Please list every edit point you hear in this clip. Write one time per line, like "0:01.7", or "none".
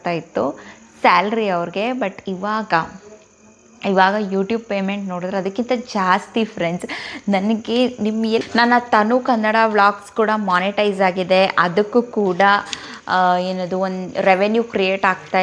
0:08.4